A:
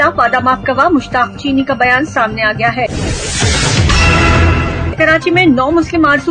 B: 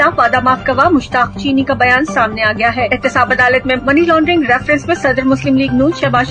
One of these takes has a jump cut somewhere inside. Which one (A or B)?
A